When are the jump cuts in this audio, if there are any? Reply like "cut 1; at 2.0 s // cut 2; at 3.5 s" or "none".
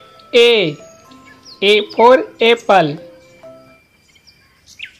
cut 1; at 3.8 s